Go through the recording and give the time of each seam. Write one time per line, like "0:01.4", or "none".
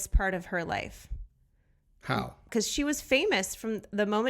0:02.5